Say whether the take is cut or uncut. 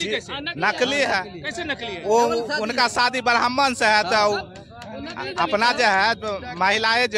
uncut